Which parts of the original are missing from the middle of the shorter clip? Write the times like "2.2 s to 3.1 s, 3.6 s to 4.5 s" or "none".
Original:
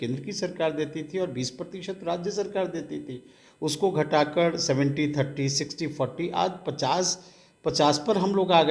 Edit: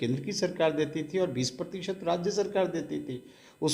none